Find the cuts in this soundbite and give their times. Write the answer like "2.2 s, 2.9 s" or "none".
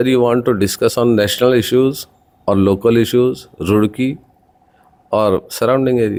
none